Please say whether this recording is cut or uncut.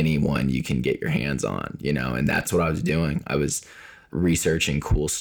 uncut